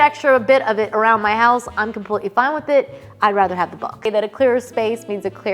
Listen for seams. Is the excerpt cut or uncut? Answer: cut